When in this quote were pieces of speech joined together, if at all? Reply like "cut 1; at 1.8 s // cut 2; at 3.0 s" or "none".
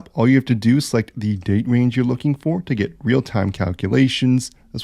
none